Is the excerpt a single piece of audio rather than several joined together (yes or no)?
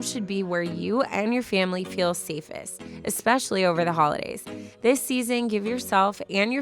yes